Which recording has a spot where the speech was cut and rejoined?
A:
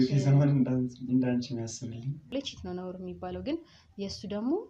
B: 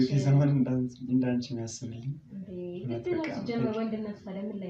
A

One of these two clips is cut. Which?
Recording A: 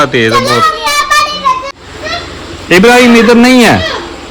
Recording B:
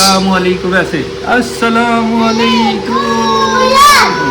A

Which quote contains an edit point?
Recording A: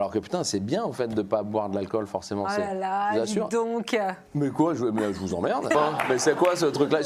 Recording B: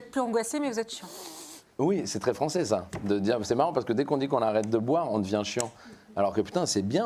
A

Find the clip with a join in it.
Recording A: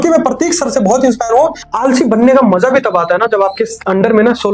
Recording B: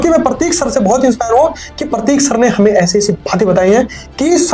A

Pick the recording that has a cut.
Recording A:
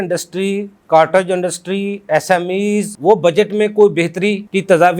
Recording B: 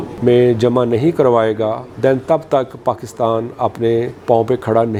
A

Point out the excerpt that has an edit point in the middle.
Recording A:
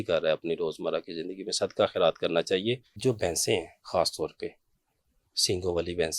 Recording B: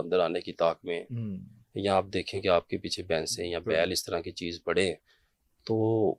A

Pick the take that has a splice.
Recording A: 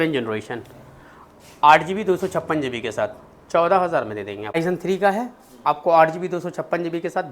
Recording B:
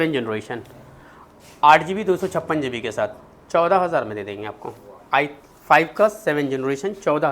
A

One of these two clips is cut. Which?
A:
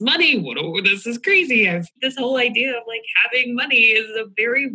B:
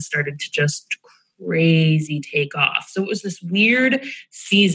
A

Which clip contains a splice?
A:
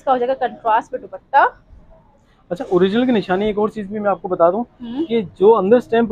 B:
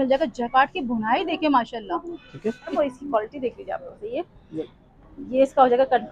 B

